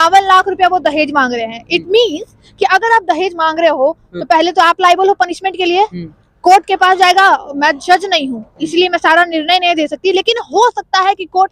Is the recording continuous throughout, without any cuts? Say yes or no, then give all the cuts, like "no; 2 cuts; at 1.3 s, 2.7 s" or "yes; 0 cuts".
yes; 0 cuts